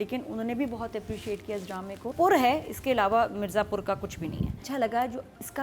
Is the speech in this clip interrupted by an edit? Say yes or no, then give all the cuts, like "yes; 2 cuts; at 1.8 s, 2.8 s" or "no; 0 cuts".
yes; 2 cuts; at 2.1 s, 4.6 s